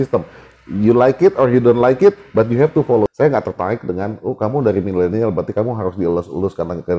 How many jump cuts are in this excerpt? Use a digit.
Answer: 1